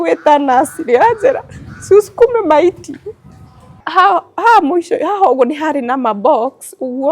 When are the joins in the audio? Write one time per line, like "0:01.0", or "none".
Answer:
0:03.8